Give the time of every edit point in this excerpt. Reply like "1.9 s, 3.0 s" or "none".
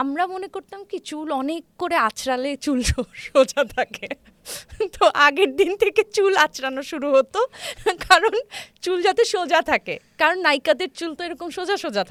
none